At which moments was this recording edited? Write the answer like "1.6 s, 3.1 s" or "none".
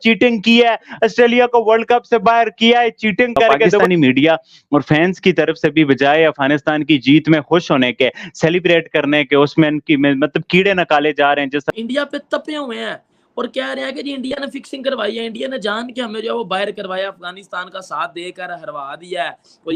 3.8 s, 11.7 s